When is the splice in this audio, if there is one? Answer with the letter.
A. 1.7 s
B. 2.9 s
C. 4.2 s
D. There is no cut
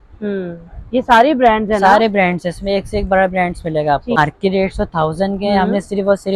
C